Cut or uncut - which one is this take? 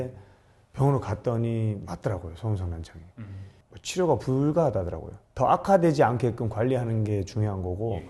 uncut